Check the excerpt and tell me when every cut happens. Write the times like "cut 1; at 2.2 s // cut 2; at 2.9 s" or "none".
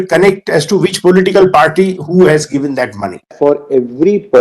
cut 1; at 3.3 s